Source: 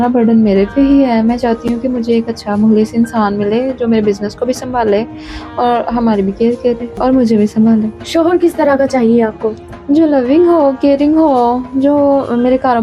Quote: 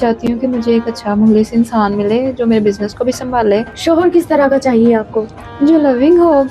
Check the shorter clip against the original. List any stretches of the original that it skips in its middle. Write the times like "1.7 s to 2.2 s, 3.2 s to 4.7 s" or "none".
5.1 s to 8.0 s